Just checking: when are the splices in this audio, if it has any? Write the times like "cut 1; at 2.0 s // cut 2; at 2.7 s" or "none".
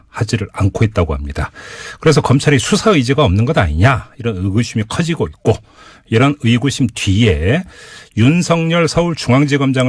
none